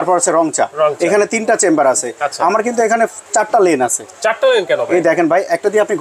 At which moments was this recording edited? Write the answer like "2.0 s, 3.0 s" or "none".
none